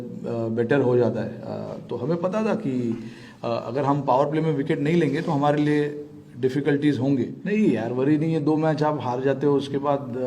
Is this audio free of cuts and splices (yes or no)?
no